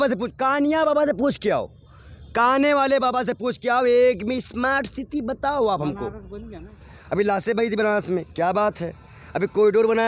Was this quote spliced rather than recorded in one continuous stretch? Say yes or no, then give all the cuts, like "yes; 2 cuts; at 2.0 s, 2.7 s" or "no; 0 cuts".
no; 0 cuts